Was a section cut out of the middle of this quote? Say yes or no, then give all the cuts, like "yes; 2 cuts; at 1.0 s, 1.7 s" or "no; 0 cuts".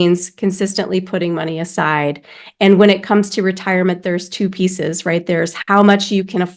no; 0 cuts